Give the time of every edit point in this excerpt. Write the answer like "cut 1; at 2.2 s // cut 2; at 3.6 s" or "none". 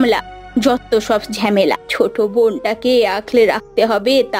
cut 1; at 1.9 s